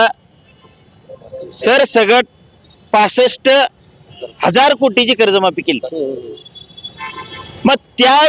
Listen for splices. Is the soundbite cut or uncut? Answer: uncut